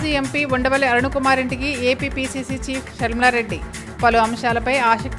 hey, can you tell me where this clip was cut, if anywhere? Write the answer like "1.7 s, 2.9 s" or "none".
none